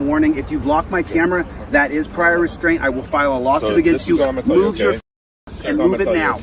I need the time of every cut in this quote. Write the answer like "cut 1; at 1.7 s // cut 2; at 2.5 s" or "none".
none